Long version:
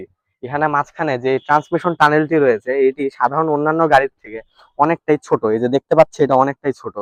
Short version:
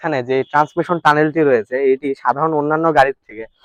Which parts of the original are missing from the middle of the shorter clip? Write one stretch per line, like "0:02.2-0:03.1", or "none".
none